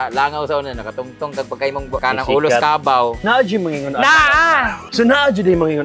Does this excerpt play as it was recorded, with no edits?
no; 3 cuts; at 2.0 s, 3.2 s, 4.8 s

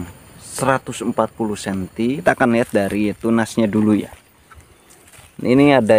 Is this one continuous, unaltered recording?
no; 1 cut; at 2.2 s

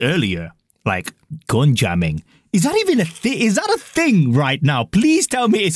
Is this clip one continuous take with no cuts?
yes; 0 cuts

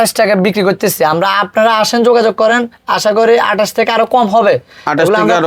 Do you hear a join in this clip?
no; 0 cuts

